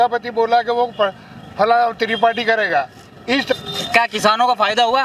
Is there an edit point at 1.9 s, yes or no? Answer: no